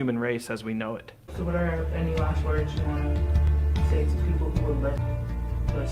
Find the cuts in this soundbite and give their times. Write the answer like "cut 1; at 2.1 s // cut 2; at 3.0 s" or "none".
cut 1; at 1.2 s // cut 2; at 5.0 s